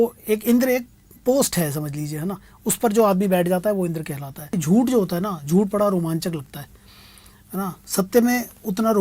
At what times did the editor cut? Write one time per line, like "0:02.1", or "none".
0:04.6